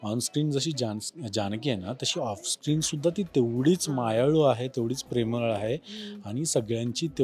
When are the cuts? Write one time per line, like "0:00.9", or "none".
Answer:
none